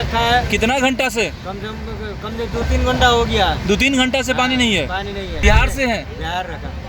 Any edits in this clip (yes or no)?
yes